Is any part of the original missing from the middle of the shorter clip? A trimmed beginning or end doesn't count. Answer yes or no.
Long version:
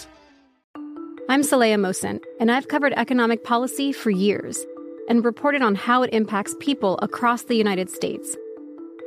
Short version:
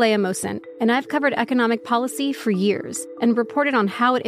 yes